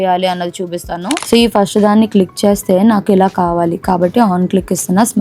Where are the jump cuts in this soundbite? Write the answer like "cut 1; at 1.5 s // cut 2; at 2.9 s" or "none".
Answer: cut 1; at 1.2 s